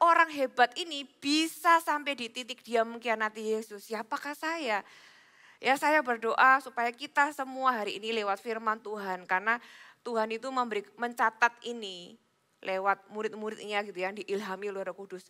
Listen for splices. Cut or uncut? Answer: uncut